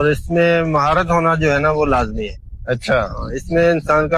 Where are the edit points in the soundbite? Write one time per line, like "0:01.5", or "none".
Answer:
none